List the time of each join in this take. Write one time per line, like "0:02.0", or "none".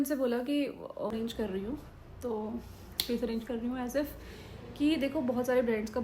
0:01.1